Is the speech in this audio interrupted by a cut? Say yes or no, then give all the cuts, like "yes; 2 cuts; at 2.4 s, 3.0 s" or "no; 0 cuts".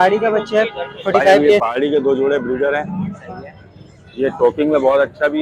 yes; 1 cut; at 1.6 s